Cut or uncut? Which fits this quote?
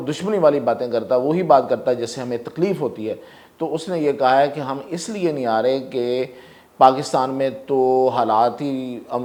uncut